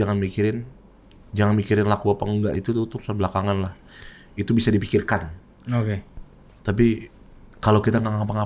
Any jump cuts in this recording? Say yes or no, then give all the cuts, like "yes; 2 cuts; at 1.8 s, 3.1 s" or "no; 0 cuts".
no; 0 cuts